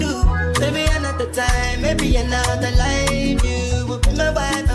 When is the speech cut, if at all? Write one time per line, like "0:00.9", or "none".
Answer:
none